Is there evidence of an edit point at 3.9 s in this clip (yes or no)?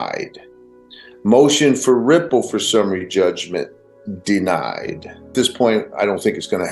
no